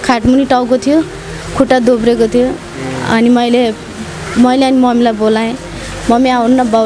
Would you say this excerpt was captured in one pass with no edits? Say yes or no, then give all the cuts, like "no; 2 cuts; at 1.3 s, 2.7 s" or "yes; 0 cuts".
yes; 0 cuts